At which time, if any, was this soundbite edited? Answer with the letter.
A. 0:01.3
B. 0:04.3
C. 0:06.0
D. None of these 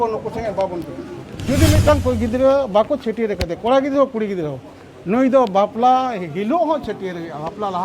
A